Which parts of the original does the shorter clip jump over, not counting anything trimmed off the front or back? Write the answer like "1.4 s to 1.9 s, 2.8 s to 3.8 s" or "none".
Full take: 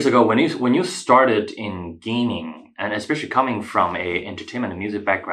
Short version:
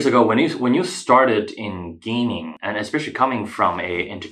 2.5 s to 2.7 s

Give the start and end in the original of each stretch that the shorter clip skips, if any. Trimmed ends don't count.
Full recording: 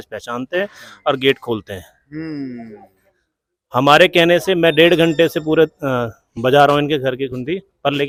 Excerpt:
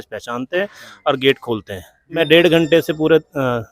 2.2 s to 4.6 s

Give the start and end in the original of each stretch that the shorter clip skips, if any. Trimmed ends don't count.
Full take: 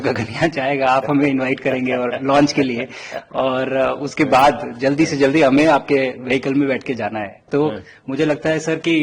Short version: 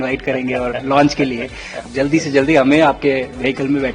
3.2 s to 4.7 s

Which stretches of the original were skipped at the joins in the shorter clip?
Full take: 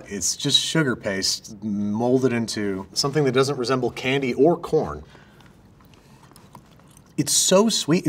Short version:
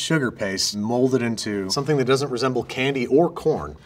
1.4 s to 1.9 s, 2.8 s to 3.0 s

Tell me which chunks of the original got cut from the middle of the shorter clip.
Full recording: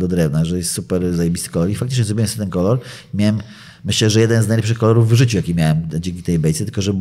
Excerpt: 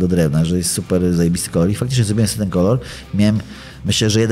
none

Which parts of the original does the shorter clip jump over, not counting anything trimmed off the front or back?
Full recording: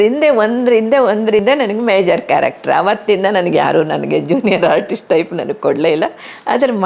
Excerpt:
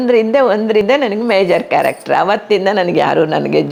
none

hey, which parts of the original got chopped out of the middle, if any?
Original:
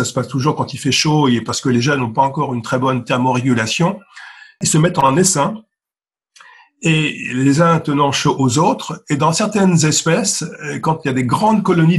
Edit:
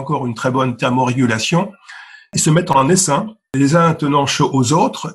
5.7 s to 7.3 s

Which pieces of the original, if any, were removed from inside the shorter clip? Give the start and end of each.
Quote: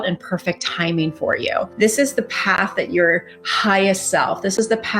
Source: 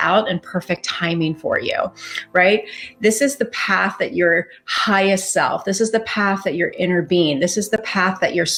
1.9 s to 2.9 s

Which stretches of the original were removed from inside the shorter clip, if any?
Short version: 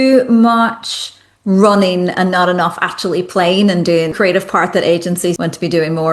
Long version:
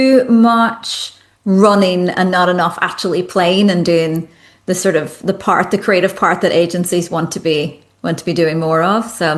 4.1 s to 5.8 s, 7.1 s to 8.0 s

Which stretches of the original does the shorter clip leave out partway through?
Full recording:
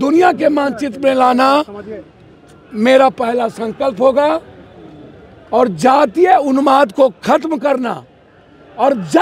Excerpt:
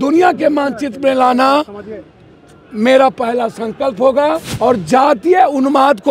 4.5 s to 5.4 s

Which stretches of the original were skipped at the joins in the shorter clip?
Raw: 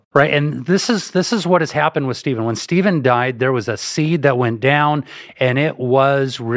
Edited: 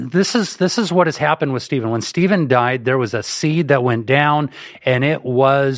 none

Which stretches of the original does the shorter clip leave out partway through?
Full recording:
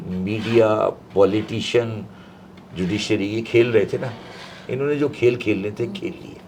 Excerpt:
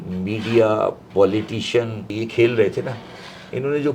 2.1 s to 3.3 s

